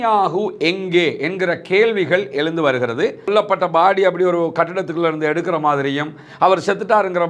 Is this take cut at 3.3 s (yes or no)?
yes